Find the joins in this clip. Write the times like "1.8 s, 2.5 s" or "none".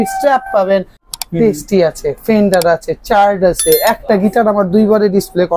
1.1 s